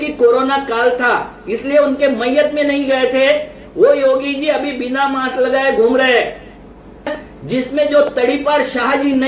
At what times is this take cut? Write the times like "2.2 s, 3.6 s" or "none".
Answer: 7.2 s